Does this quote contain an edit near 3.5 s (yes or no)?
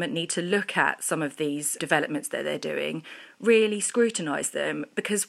no